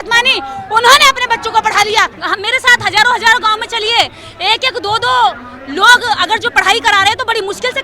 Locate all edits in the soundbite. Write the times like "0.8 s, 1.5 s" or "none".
2.2 s